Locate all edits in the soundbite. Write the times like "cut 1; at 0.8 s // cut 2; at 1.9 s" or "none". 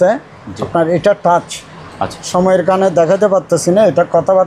none